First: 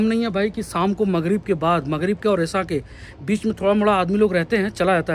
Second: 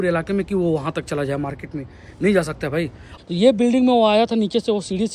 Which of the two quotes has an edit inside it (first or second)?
second